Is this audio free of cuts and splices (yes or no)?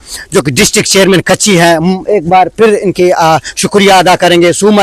yes